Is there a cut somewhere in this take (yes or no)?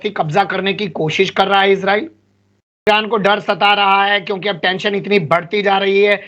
yes